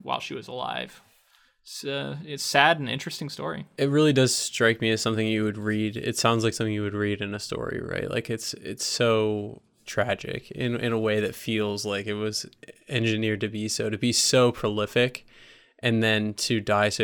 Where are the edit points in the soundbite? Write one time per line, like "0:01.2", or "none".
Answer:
0:03.6